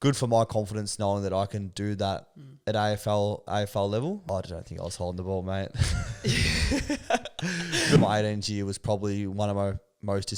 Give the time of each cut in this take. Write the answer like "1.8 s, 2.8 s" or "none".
4.2 s, 8.0 s